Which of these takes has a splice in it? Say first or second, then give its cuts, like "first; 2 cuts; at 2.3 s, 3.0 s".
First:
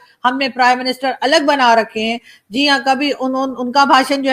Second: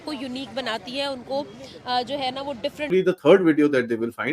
second; 1 cut; at 2.9 s